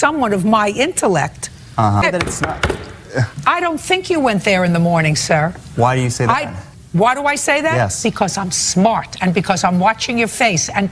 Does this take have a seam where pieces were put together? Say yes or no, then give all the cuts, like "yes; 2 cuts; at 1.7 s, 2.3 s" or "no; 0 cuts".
yes; 1 cut; at 2.0 s